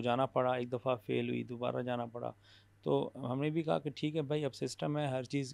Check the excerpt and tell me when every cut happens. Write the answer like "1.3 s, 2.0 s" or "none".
none